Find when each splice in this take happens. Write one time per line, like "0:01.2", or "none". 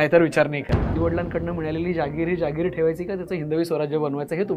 0:00.9